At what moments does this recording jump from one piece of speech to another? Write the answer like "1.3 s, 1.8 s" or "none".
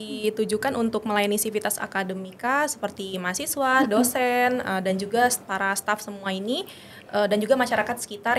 none